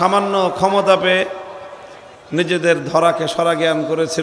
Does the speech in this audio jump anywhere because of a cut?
no; 0 cuts

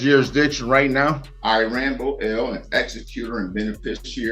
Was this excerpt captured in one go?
no; 1 cut; at 1.3 s

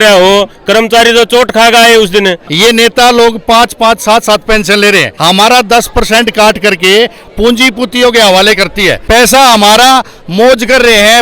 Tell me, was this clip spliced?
yes; 3 cuts; at 2.4 s, 5.1 s, 9.0 s

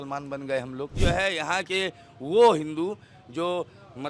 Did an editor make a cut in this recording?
yes; 1 cut; at 0.9 s

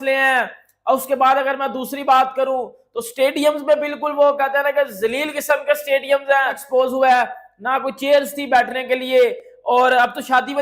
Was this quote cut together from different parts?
yes; 1 cut; at 6.6 s

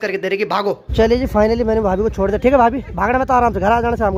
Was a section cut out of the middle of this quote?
yes; 2 cuts; at 0.8 s, 2.9 s

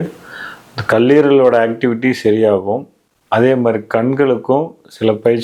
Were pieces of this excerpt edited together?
no; 0 cuts

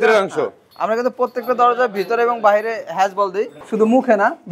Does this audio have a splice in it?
yes; 1 cut; at 3.6 s

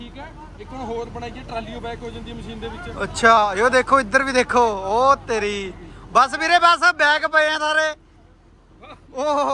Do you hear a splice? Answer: no; 0 cuts

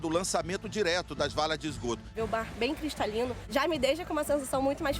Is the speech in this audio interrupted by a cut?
yes; 2 cuts; at 2.1 s, 3.5 s

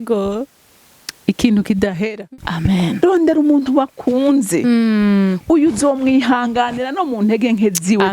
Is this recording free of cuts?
no; 1 cut; at 2.2 s

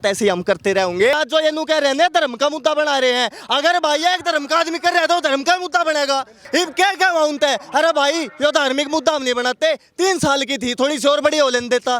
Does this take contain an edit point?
yes; 2 cuts; at 1.1 s, 6.4 s

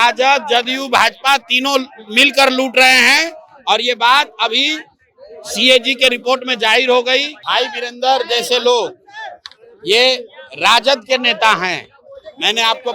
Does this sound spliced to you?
yes; 1 cut; at 7.4 s

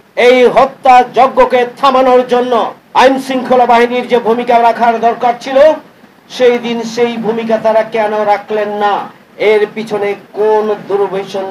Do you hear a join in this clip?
yes; 1 cut; at 2.8 s

